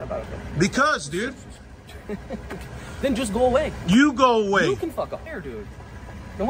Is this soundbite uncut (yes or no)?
no